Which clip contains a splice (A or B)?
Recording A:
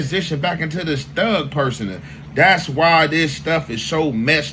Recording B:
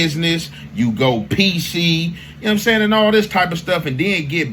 A